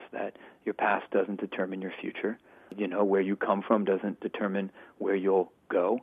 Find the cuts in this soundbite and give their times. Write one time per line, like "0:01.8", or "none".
0:02.7